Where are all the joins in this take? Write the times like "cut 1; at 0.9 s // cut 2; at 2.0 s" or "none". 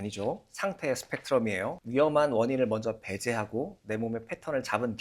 cut 1; at 1.8 s